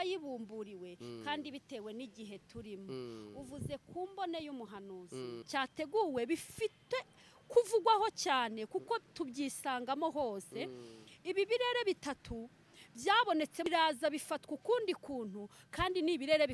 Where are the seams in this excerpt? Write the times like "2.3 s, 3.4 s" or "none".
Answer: 5.5 s, 13.7 s